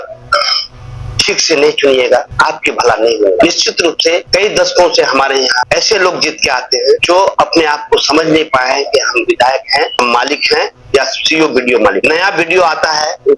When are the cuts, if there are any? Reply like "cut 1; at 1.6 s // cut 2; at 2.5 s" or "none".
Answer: none